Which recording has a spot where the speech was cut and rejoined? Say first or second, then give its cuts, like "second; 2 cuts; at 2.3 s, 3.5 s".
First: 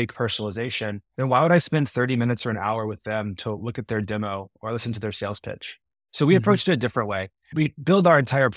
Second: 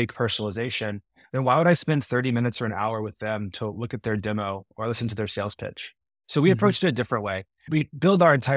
first; 1 cut; at 1.0 s